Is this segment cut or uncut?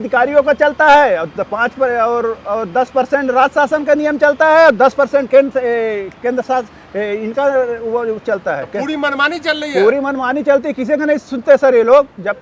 uncut